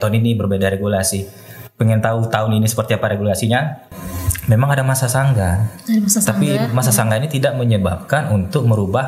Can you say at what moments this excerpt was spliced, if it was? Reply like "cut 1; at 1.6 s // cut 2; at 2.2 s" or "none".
cut 1; at 3.9 s